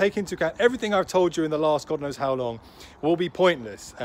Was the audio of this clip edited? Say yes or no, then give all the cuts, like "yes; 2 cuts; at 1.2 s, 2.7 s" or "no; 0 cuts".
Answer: no; 0 cuts